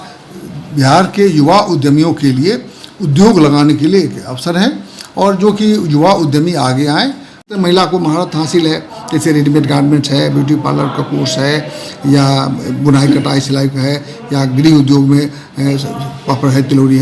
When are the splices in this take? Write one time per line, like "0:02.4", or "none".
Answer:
0:07.5